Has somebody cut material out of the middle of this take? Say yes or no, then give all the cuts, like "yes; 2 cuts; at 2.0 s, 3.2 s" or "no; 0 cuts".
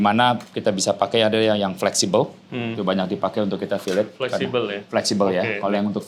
no; 0 cuts